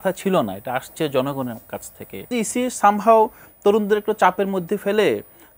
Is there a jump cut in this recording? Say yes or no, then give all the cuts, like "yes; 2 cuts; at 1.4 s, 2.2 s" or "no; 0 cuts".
yes; 1 cut; at 2.3 s